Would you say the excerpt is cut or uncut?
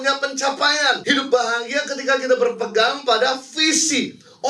cut